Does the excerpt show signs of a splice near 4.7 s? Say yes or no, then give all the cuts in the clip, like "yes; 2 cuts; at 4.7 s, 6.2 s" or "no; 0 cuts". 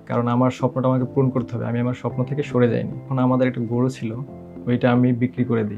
no; 1 cut; at 3.1 s